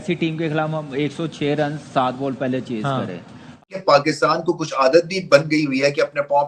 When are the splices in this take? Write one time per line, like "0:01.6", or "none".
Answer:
0:03.7